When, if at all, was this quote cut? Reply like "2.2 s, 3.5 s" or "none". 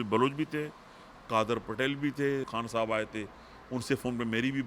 2.5 s